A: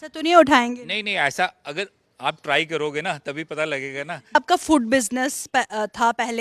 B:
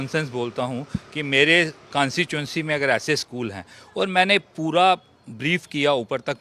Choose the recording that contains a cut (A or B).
A